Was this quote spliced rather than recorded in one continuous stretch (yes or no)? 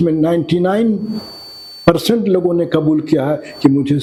no